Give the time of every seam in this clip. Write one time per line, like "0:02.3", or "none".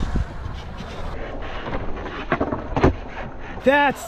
none